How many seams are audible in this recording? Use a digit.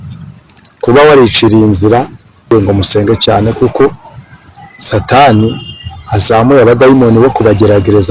1